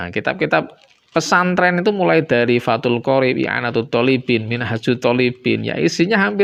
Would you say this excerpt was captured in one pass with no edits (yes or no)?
yes